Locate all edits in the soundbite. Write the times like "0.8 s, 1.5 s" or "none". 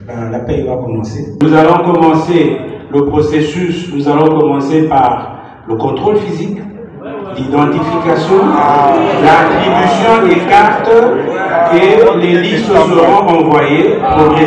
1.4 s